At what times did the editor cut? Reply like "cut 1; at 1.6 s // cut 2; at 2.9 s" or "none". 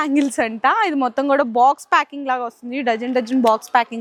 none